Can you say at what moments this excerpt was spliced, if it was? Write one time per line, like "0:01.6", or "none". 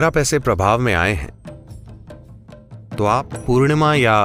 0:03.2

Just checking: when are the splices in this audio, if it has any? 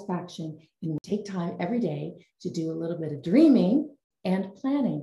0:01.0
0:04.0

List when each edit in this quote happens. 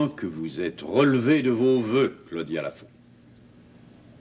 none

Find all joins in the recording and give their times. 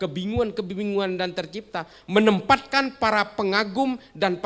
0:02.0

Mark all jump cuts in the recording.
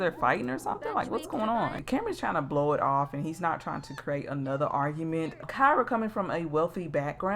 0:01.8
0:05.4

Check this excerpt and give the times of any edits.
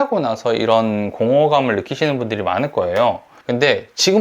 0:03.3

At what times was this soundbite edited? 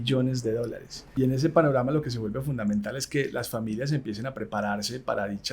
0:01.0

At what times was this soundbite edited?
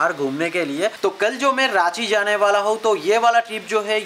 0:00.9

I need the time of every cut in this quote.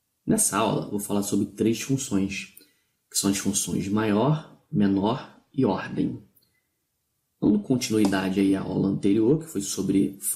none

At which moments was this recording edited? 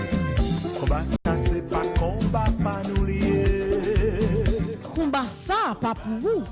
0:01.2

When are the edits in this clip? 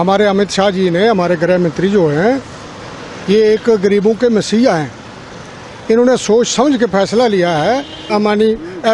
0:08.0

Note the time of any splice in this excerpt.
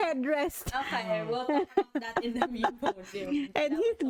none

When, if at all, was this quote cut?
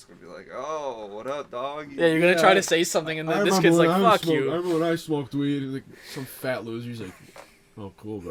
none

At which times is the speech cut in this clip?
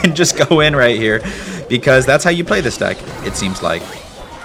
none

